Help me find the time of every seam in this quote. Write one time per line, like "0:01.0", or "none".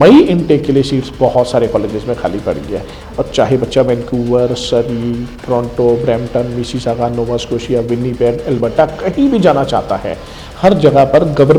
none